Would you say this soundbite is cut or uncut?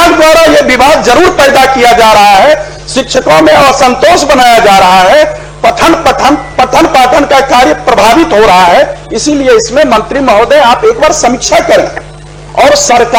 uncut